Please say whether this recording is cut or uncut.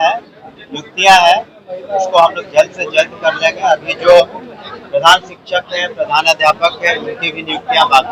uncut